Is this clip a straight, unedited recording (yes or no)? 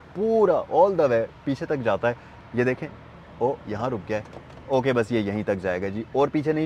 yes